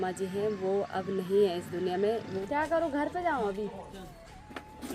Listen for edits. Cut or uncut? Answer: cut